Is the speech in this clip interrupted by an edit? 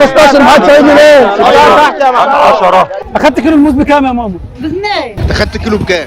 yes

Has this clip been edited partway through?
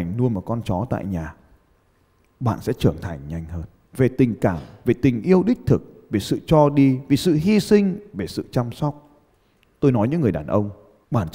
no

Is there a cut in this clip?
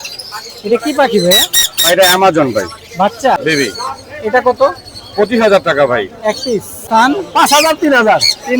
yes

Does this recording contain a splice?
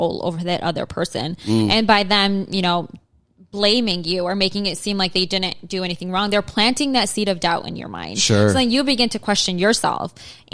no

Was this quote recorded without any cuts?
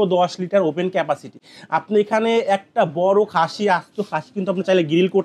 yes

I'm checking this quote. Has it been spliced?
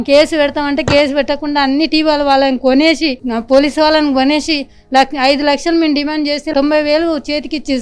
no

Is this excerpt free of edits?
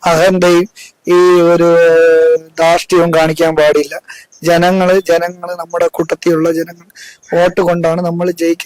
yes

